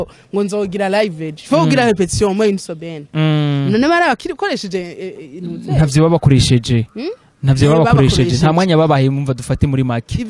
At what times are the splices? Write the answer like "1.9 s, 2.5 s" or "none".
none